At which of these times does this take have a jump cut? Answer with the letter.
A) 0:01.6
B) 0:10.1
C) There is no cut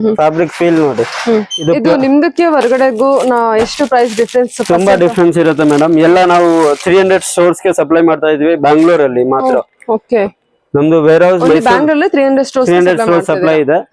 A